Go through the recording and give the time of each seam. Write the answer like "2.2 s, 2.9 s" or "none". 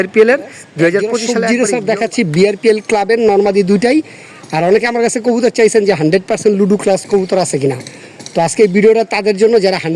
1.2 s